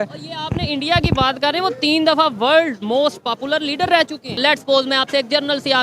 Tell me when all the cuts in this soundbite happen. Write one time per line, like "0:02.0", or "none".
0:04.4